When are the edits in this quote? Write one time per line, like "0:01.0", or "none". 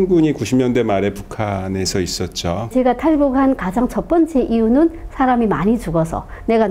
0:02.7

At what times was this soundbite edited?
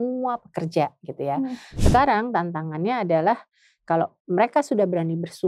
0:01.8

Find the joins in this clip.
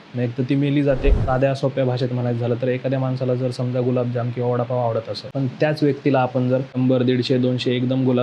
0:01.2
0:05.3
0:06.7

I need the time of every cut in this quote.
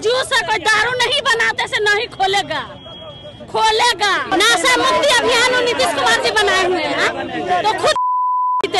0:04.3

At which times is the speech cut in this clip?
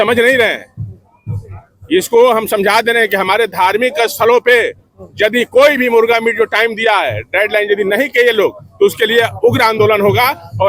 none

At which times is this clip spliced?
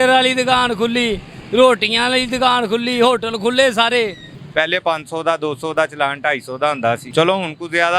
0:04.3
0:07.1

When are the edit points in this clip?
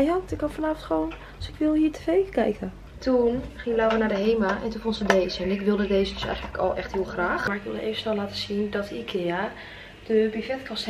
0:03.0
0:07.5

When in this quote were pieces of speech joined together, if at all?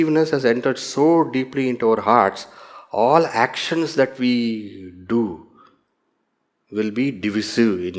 none

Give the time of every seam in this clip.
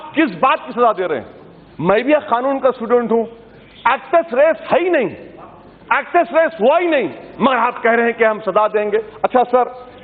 none

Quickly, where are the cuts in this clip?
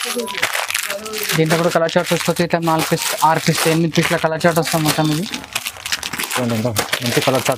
none

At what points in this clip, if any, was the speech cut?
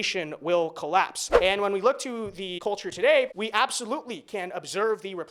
0:01.2
0:02.5
0:03.3

